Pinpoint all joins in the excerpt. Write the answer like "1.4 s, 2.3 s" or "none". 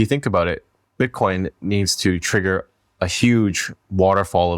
none